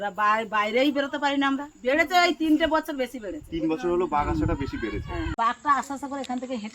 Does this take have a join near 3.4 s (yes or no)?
no